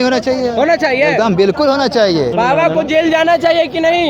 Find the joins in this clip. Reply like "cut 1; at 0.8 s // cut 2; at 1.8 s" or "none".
cut 1; at 2.3 s